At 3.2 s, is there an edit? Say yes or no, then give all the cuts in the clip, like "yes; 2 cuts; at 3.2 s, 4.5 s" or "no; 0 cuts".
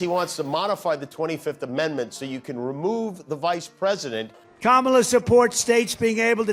no; 1 cut; at 4.4 s